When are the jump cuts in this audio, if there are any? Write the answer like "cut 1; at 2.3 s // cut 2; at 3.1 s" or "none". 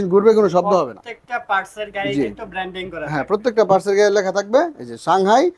none